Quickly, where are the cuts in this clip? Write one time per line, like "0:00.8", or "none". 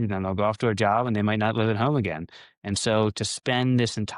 none